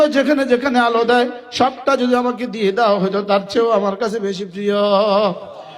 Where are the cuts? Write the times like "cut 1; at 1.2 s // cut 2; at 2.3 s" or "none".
none